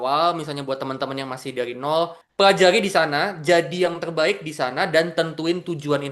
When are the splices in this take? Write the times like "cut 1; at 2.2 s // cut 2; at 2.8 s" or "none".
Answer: cut 1; at 2.2 s